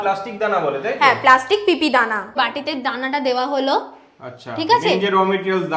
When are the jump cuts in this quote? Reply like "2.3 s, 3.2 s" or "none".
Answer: 2.3 s